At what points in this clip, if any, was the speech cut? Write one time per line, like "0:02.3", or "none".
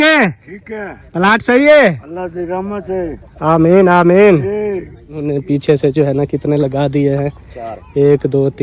0:05.3